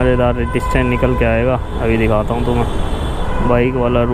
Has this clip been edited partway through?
no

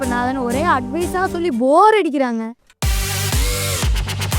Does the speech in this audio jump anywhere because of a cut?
yes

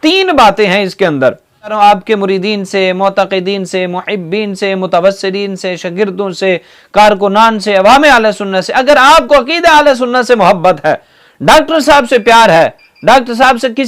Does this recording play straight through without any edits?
no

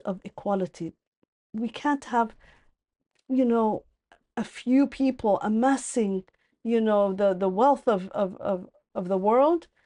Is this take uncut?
yes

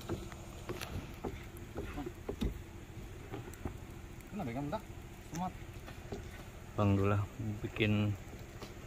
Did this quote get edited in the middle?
yes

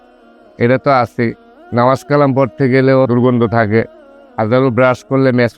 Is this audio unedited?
no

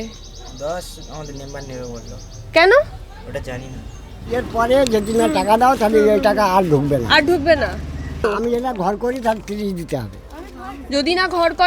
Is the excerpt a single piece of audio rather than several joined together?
no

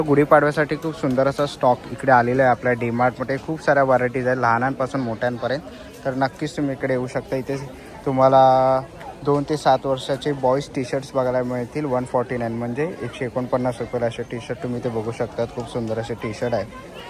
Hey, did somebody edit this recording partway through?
no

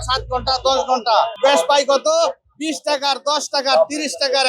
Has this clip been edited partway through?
yes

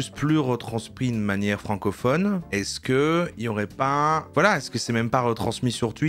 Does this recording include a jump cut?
yes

